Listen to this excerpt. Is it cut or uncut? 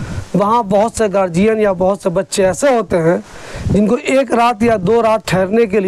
uncut